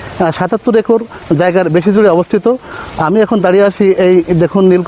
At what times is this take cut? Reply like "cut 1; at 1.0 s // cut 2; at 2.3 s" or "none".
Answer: none

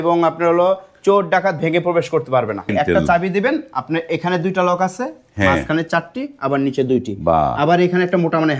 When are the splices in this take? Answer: cut 1; at 2.7 s

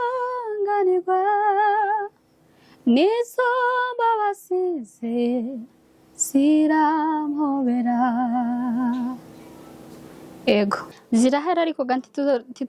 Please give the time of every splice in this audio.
cut 1; at 10.9 s

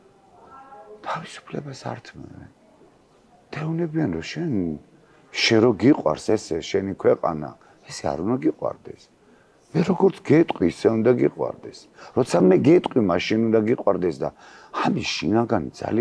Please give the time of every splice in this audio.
none

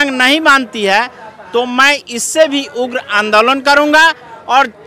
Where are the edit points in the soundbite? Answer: none

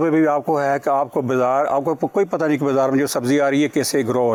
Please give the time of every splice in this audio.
none

